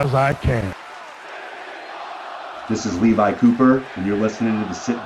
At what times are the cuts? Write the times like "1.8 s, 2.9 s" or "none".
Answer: 0.7 s, 2.7 s